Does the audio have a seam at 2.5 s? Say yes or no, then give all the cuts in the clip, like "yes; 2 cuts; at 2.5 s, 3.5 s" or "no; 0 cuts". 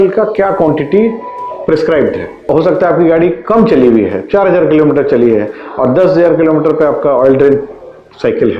yes; 1 cut; at 2.5 s